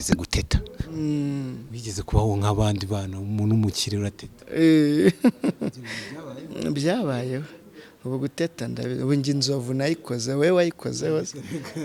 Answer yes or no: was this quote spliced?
no